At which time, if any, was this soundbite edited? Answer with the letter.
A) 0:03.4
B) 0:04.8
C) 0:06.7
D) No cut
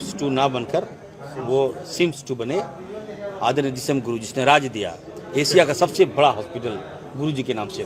D